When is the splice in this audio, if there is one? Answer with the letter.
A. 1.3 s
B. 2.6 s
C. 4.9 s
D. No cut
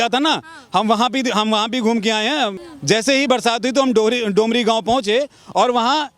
B